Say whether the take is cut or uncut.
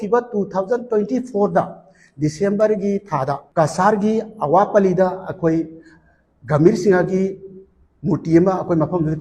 cut